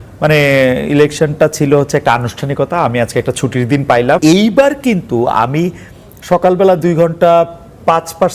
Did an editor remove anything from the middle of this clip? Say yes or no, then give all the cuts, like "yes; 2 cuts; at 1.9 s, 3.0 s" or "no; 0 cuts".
yes; 1 cut; at 4.2 s